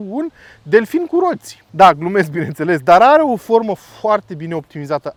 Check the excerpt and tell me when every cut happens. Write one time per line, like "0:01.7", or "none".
none